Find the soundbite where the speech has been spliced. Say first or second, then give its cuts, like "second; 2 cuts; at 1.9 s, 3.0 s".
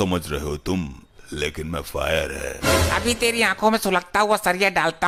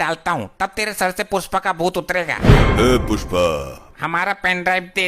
second; 1 cut; at 3.9 s